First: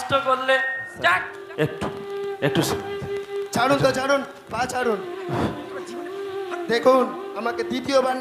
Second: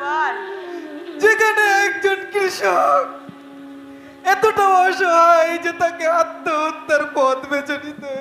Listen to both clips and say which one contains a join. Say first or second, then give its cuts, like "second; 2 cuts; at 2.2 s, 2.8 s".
first; 1 cut; at 1.0 s